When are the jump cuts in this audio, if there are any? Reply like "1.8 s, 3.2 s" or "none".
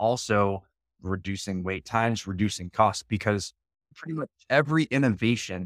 none